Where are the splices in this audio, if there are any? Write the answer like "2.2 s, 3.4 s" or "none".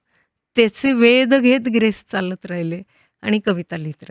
none